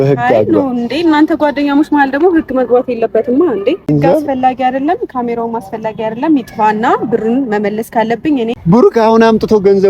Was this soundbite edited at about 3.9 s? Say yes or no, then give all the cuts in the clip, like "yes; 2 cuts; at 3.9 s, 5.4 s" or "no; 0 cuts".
yes; 2 cuts; at 3.9 s, 8.5 s